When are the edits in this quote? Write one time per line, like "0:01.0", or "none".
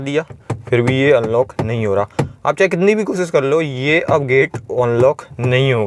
none